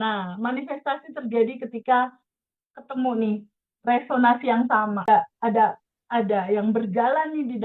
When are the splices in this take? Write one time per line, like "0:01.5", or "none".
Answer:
0:05.1